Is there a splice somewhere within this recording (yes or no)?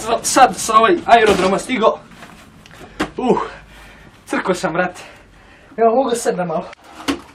no